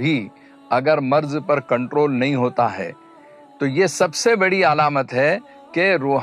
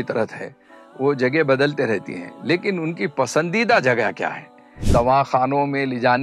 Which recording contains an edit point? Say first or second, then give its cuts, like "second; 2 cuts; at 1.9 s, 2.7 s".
second; 1 cut; at 4.8 s